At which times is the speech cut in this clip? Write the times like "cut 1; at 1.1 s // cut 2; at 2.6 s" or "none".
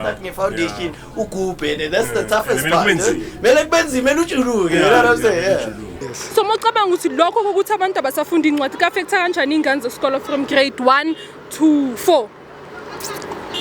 cut 1; at 5.9 s